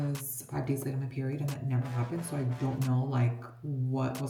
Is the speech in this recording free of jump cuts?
yes; 0 cuts

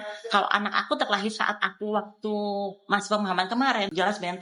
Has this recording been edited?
no; 0 cuts

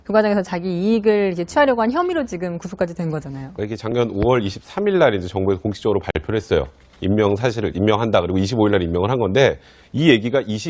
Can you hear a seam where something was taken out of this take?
yes; 1 cut; at 2.4 s

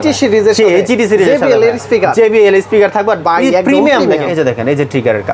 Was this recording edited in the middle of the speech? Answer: yes; 1 cut; at 4.3 s

